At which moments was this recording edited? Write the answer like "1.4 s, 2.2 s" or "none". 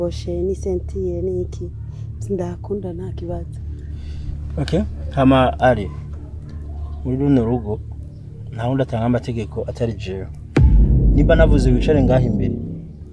none